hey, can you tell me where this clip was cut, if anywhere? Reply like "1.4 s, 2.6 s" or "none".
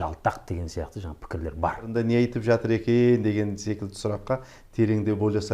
1.9 s